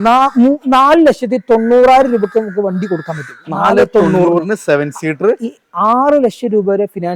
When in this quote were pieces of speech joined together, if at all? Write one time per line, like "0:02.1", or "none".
none